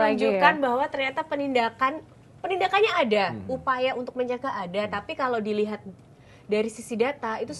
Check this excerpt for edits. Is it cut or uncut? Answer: uncut